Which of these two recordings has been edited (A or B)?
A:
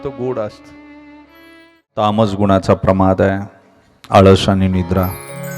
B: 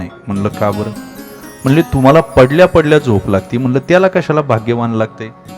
A